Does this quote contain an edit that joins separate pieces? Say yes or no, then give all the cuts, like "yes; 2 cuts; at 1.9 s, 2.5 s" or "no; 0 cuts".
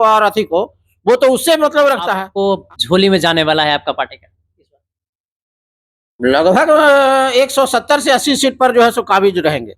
yes; 1 cut; at 2.3 s